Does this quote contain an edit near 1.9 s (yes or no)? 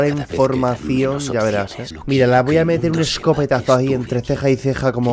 yes